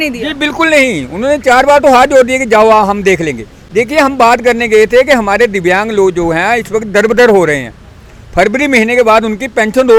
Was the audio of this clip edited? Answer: no; 0 cuts

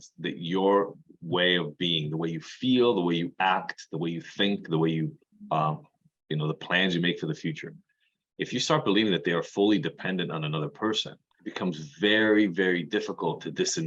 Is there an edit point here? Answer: no; 0 cuts

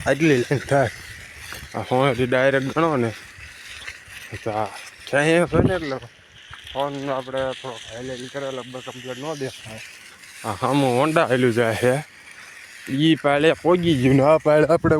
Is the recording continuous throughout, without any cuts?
yes; 0 cuts

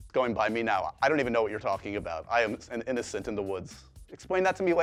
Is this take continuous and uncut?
yes; 0 cuts

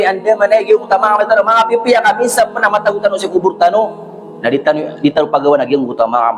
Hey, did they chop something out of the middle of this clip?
no; 0 cuts

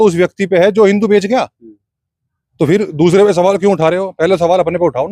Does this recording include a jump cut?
no; 0 cuts

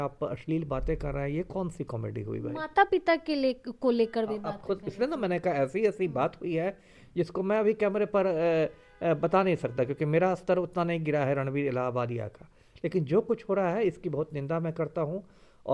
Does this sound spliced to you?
no; 0 cuts

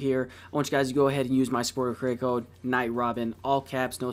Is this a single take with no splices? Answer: yes; 0 cuts

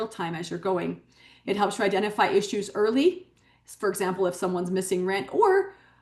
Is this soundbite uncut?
yes; 0 cuts

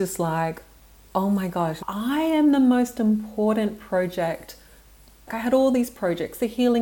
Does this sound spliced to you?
yes; 2 cuts; at 1.8 s, 5.3 s

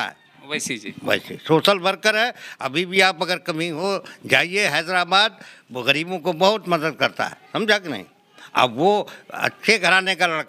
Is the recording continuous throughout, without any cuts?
yes; 0 cuts

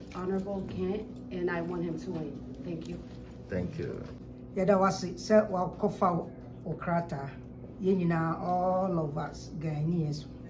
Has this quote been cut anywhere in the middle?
no; 0 cuts

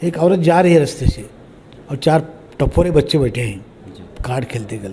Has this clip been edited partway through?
no; 0 cuts

